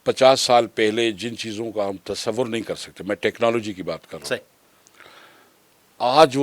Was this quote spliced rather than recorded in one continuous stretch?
no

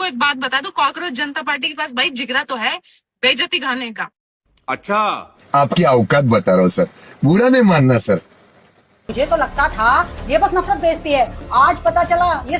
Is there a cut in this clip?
yes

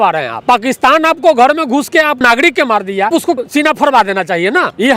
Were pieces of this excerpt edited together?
no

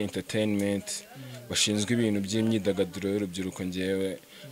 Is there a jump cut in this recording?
no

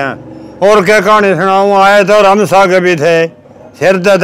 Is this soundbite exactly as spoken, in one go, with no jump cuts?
yes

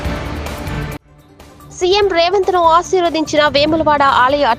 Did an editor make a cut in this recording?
yes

